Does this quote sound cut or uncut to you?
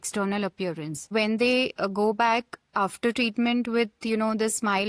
cut